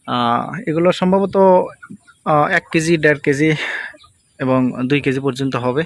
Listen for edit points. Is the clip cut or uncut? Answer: uncut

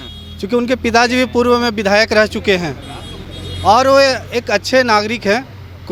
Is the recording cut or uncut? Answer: uncut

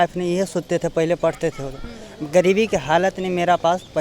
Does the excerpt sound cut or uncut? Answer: uncut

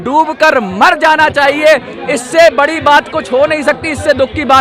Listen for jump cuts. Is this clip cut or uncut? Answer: uncut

